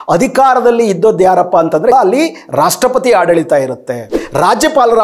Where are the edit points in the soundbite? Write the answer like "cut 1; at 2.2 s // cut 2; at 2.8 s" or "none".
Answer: cut 1; at 1.9 s // cut 2; at 4.1 s